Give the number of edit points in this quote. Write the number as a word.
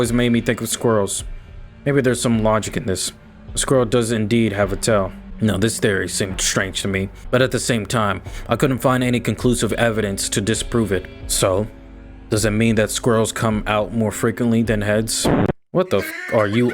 three